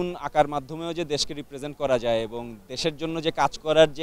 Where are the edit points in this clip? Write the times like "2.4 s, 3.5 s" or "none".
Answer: none